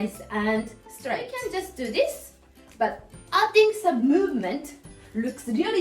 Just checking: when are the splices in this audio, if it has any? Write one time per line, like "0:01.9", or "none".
0:01.3